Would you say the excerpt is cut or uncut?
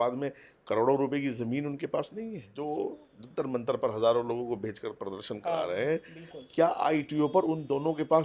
cut